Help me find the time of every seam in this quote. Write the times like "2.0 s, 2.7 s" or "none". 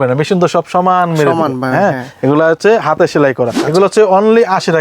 3.6 s